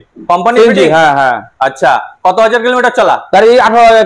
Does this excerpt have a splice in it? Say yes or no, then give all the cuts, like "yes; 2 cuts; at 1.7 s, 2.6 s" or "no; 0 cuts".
no; 0 cuts